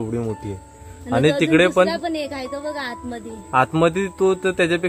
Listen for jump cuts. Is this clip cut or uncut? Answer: uncut